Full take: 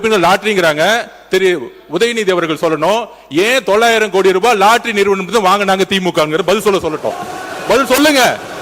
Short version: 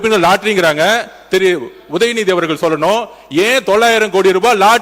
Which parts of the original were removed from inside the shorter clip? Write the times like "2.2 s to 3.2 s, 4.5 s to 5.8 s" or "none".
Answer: none